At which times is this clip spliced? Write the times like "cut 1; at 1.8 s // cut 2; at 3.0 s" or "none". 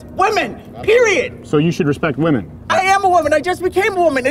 cut 1; at 2.7 s